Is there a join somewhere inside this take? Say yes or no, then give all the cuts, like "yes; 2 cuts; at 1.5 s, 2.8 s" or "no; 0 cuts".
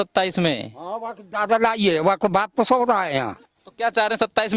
yes; 1 cut; at 3.5 s